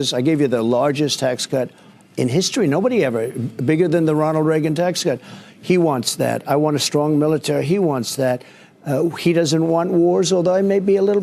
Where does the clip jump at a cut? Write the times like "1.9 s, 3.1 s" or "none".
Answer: none